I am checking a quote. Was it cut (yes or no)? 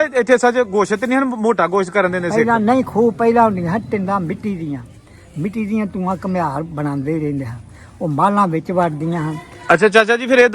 yes